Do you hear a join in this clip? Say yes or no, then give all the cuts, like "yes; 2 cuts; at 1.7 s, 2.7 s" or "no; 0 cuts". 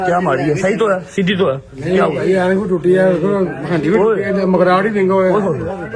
no; 0 cuts